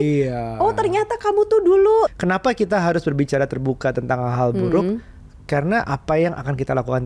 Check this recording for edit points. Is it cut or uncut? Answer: cut